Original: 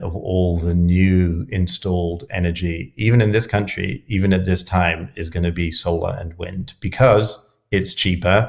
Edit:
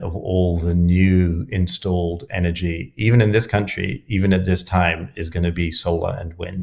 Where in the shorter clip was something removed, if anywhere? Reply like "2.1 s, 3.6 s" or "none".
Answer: none